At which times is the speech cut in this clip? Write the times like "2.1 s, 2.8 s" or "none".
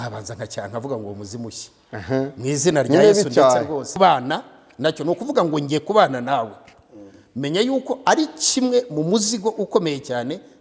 4.0 s